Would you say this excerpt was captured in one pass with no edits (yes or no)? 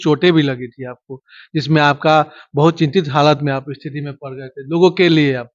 yes